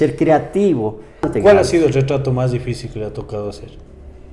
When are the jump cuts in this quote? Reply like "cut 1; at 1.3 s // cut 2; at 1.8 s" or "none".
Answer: cut 1; at 1.3 s